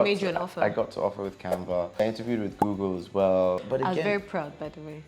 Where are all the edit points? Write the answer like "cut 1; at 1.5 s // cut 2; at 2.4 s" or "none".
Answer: cut 1; at 2.0 s // cut 2; at 3.6 s